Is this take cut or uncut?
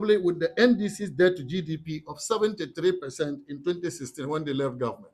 uncut